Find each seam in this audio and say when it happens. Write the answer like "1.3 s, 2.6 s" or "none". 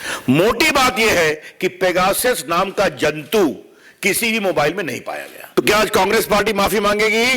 5.4 s